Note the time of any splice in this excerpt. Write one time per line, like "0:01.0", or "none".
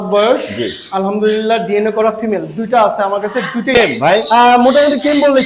0:03.8